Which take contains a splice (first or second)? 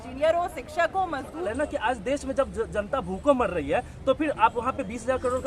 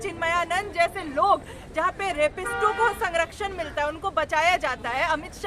first